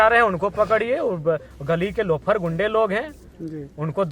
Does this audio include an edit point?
yes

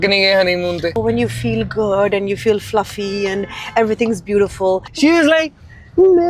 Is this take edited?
yes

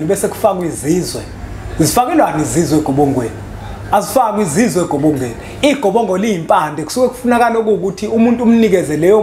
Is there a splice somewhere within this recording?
no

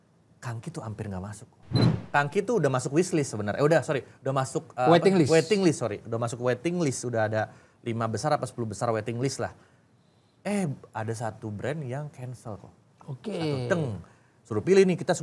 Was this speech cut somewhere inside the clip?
yes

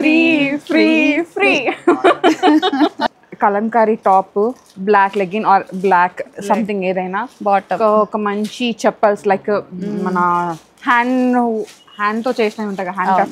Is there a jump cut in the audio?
yes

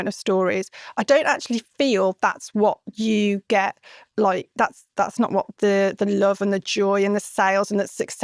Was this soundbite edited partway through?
no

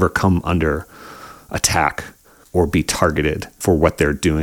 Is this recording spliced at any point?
yes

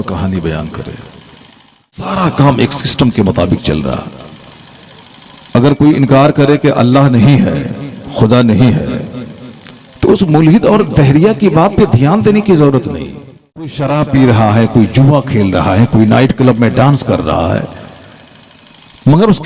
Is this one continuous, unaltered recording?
no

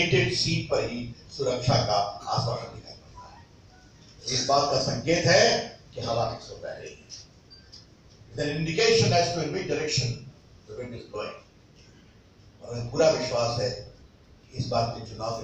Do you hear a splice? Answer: no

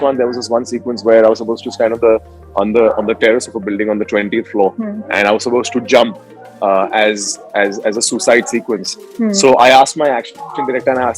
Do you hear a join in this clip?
no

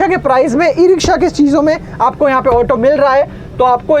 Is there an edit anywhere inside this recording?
no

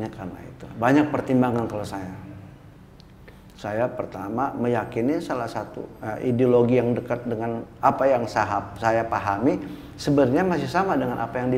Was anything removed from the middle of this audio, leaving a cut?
no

